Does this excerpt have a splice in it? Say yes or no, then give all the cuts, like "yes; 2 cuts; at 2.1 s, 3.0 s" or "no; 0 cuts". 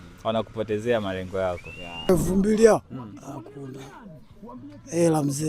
yes; 1 cut; at 2.1 s